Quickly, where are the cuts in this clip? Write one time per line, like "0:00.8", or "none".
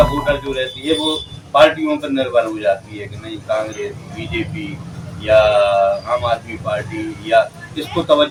none